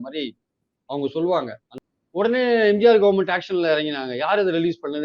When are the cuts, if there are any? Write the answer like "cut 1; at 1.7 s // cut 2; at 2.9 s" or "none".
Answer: cut 1; at 1.6 s